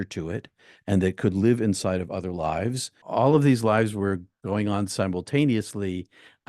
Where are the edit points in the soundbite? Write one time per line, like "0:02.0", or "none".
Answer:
0:02.9